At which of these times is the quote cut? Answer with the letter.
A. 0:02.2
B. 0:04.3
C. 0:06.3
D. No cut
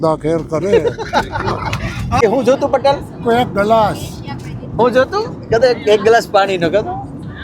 A